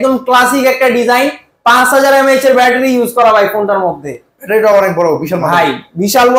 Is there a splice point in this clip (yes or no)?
no